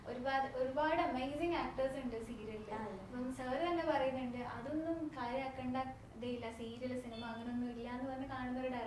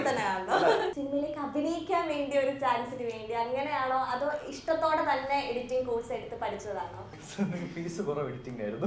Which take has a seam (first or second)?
second